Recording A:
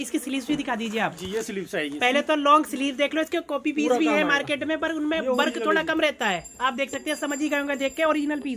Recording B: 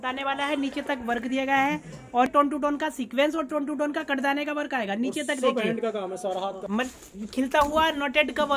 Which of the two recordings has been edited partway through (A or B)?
B